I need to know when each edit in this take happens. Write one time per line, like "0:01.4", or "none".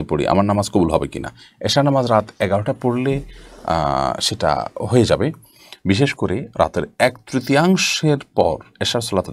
none